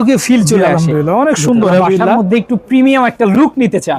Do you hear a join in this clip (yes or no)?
yes